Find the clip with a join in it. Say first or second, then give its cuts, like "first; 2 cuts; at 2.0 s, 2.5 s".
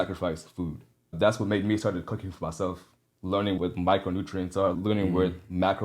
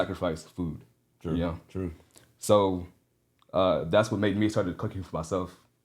first; 3 cuts; at 1.1 s, 3.6 s, 4.8 s